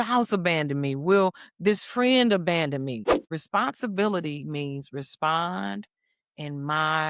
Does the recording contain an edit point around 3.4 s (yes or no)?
yes